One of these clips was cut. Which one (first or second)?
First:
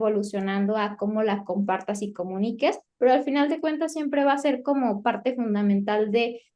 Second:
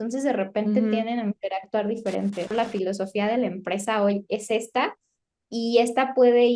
second